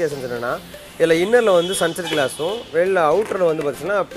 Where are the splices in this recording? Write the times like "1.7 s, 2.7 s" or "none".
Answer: none